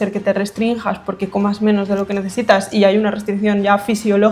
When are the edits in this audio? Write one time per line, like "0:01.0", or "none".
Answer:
none